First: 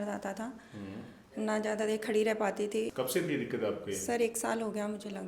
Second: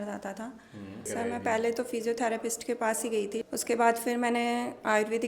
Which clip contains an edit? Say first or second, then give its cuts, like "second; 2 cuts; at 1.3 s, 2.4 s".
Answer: second; 2 cuts; at 1.1 s, 3.4 s